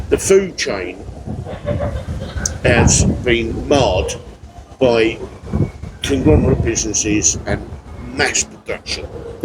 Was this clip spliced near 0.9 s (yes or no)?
no